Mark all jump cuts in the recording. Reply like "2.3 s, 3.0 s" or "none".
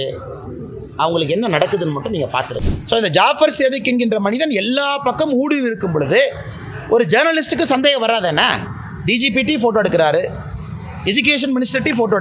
2.5 s

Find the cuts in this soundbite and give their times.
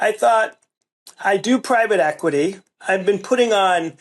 2.8 s

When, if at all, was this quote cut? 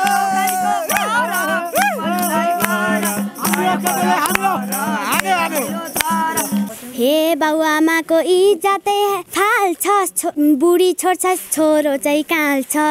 6.7 s, 9.3 s, 10.3 s

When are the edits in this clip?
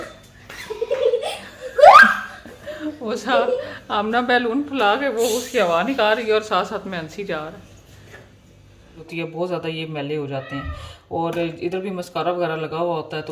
9.1 s

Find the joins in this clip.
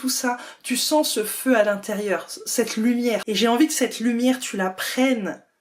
3.2 s

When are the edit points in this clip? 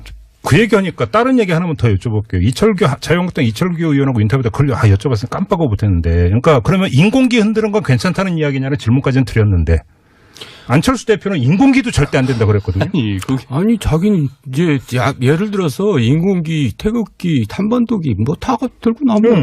5.7 s

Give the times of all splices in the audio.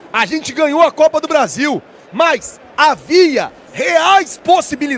none

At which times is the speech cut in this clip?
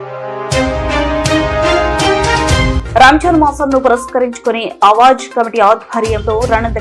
none

